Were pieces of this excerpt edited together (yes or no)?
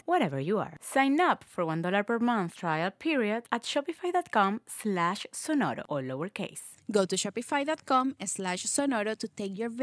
no